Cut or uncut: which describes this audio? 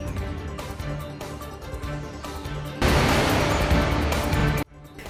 uncut